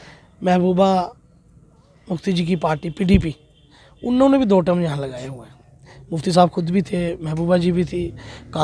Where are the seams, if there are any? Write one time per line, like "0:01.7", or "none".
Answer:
none